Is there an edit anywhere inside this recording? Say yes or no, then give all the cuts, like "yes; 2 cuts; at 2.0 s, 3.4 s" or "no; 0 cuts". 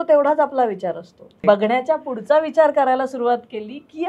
yes; 1 cut; at 1.4 s